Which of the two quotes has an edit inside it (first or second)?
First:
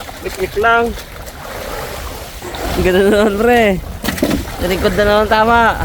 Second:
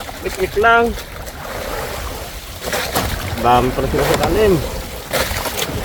first